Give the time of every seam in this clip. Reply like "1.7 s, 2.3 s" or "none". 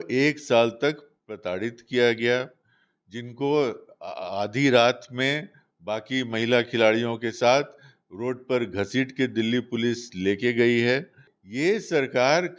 none